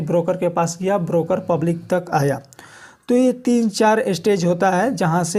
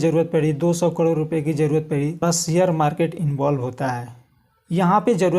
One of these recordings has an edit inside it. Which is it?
second; 1 cut; at 2.2 s

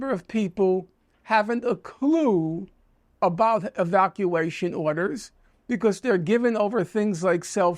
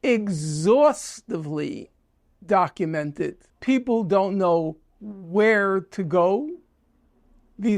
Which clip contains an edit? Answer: second; 1 cut; at 3.5 s

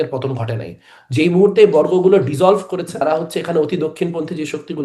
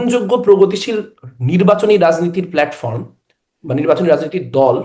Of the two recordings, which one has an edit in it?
first; 1 cut; at 3.0 s

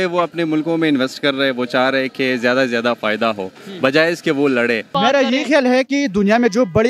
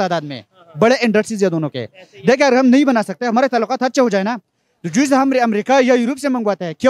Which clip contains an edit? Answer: first; 1 cut; at 4.9 s

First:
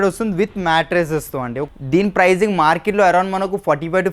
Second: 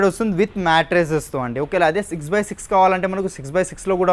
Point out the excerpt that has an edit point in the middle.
first; 1 cut; at 1.6 s

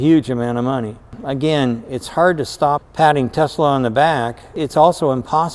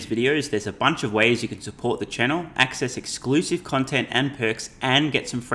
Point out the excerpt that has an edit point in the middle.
first; 3 cuts; at 1.1 s, 2.9 s, 4.5 s

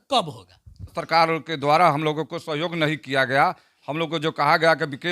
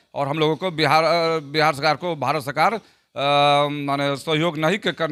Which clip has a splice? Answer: first; 1 cut; at 1.0 s

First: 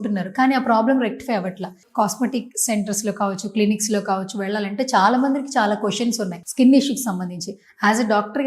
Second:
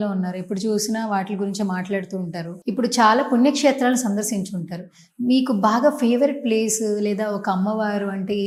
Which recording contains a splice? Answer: first; 1 cut; at 1.8 s

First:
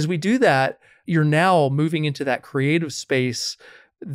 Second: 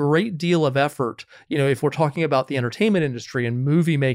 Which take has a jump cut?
first; 1 cut; at 0.9 s

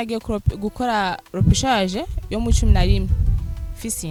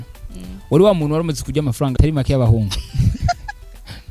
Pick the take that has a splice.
second; 1 cut; at 2.0 s

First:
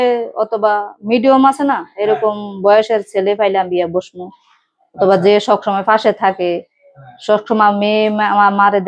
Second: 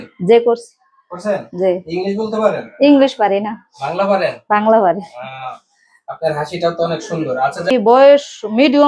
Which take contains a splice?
second; 1 cut; at 7.7 s

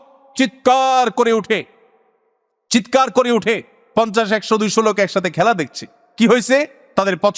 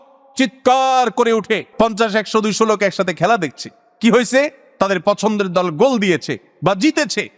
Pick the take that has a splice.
second; 1 cut; at 1.7 s

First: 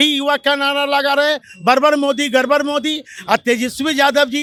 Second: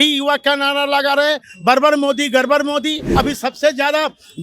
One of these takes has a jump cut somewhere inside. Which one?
second; 1 cut; at 3.0 s

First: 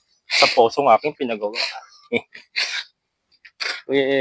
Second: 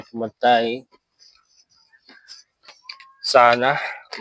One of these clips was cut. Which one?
second; 1 cut; at 2.9 s

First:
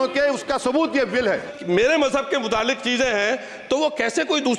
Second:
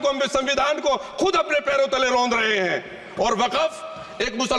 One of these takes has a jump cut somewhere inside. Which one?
first; 1 cut; at 1.5 s

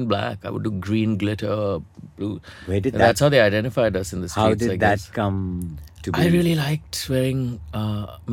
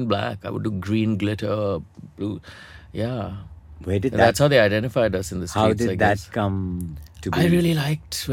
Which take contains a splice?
first; 1 cut; at 2.5 s

